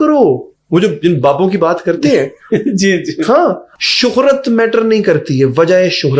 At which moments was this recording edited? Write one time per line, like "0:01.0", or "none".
0:03.7